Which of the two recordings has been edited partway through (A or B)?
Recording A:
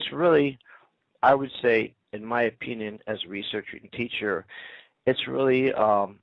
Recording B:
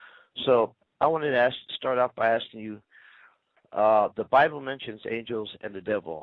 A